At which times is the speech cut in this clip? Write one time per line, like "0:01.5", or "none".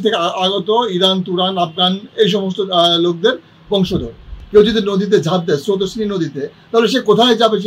0:04.3